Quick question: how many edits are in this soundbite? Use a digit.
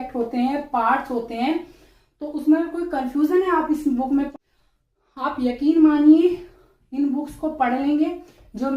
1